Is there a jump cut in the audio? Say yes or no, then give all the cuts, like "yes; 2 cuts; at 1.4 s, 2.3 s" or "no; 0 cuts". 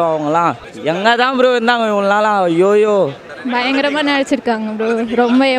yes; 1 cut; at 3.3 s